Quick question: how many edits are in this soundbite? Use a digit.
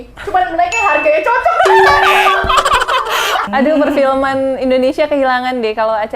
1